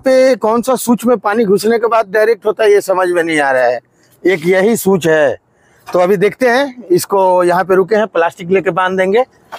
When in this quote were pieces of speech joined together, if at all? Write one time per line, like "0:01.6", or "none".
none